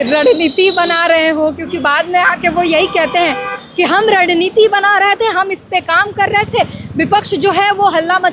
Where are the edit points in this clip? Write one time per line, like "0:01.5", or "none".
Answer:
none